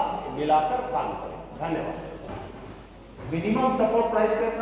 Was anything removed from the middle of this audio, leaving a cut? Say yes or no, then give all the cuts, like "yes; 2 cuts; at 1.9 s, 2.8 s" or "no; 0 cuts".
no; 0 cuts